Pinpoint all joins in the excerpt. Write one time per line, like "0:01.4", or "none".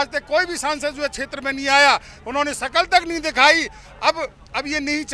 none